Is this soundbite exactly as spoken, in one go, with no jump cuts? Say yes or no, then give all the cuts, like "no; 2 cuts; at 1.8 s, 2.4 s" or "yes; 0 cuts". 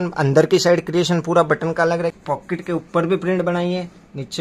no; 1 cut; at 2.1 s